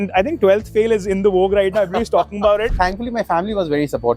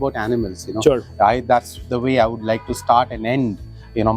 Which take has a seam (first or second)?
first